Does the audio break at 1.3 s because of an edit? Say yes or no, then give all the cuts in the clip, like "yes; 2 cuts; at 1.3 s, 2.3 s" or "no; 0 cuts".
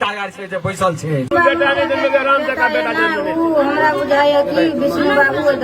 yes; 1 cut; at 1.3 s